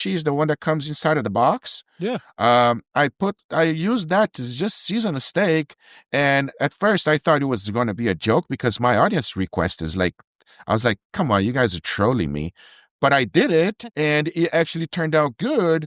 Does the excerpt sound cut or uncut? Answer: uncut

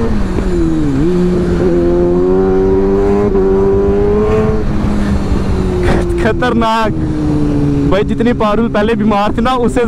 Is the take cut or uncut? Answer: uncut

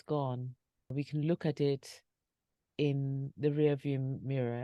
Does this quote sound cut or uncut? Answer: cut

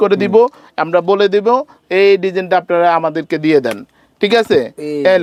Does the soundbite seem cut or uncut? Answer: uncut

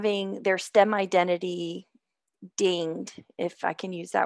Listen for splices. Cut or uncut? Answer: uncut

